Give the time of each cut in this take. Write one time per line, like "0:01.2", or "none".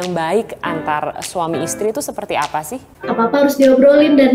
0:02.8